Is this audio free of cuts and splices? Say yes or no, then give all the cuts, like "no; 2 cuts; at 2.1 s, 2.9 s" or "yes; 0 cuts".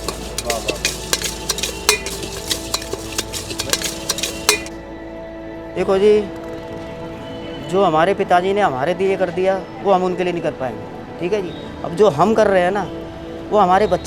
yes; 0 cuts